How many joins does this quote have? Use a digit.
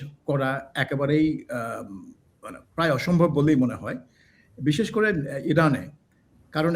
0